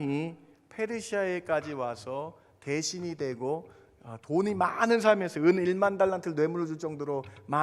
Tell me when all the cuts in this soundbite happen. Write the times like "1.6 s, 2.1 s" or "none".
none